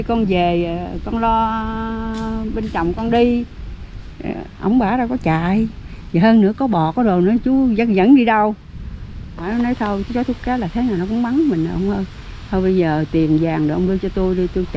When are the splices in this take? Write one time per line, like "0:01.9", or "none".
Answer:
0:09.4